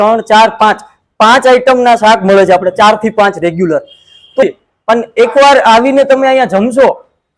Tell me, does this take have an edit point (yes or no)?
yes